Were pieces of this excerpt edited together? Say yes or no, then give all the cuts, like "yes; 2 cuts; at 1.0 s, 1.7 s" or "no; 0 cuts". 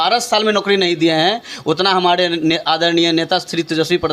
no; 0 cuts